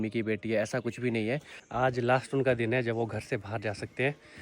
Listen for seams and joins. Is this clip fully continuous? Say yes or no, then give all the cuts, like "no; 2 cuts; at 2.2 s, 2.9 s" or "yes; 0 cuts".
no; 1 cut; at 1.5 s